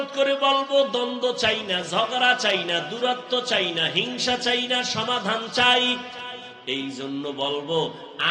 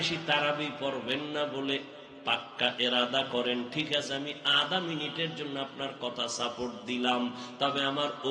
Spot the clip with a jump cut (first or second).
first